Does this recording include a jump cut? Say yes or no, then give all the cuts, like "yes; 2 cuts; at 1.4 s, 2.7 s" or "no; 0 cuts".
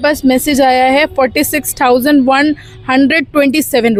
no; 0 cuts